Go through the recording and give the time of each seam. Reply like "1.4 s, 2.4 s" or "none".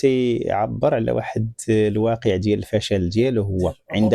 none